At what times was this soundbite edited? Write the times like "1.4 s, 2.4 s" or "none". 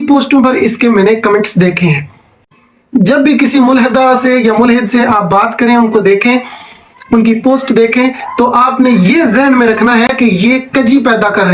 2.5 s